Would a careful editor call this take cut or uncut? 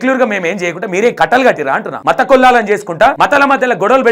cut